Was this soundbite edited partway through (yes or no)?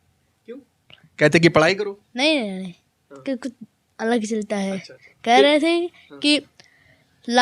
no